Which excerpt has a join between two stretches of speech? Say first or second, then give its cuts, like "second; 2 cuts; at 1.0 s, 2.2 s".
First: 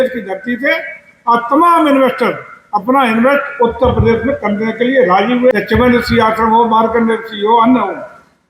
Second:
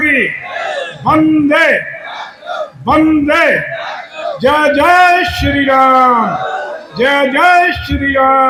first; 1 cut; at 5.5 s